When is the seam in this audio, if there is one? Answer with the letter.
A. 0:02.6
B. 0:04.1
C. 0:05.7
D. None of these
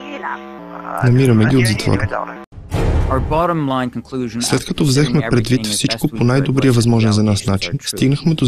A